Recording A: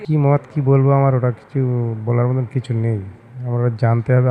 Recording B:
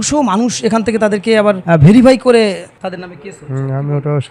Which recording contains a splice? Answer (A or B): B